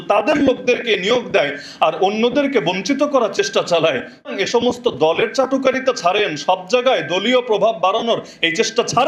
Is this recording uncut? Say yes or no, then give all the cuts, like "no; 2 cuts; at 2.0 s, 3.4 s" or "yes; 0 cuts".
no; 1 cut; at 4.3 s